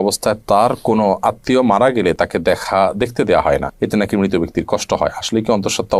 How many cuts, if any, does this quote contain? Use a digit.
0